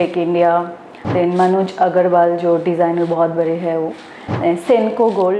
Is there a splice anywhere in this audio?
no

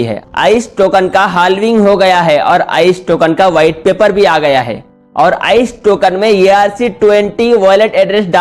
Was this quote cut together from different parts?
no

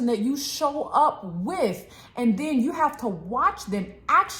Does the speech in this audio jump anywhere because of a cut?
no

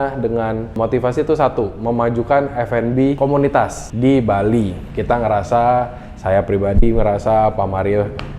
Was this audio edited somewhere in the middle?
yes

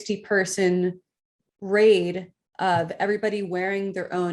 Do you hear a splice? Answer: no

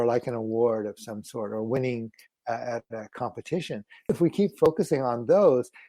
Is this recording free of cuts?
no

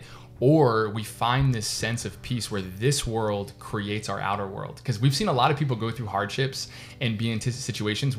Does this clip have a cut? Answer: no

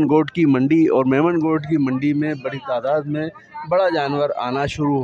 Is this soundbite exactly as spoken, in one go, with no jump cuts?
yes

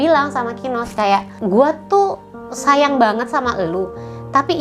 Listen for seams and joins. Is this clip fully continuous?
no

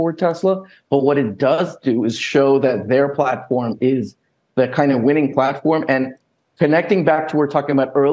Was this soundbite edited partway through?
yes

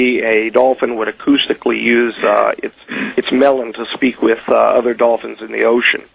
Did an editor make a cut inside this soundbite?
yes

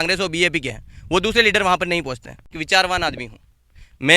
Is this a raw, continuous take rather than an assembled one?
no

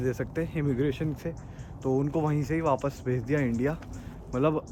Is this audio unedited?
yes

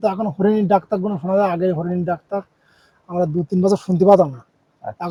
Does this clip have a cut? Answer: no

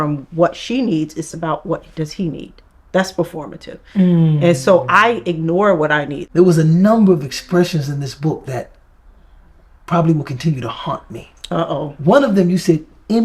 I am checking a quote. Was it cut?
yes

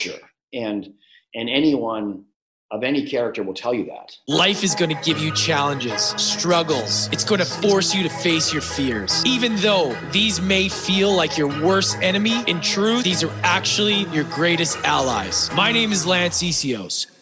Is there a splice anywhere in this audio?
yes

